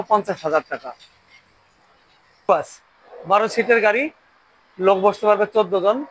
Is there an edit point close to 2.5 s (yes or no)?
yes